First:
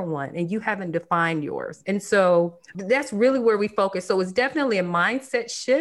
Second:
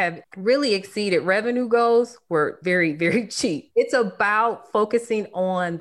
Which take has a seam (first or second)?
second